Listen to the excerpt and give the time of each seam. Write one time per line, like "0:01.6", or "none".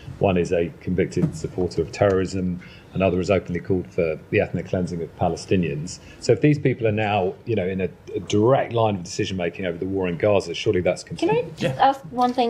0:11.1